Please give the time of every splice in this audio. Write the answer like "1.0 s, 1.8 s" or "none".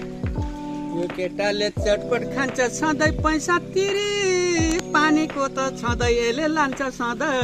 none